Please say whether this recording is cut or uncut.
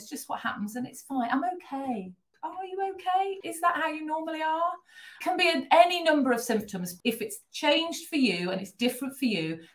cut